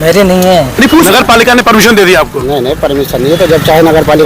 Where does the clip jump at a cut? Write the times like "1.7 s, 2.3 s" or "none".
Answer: 1.0 s